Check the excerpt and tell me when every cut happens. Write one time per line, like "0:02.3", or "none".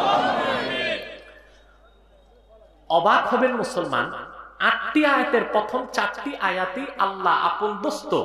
none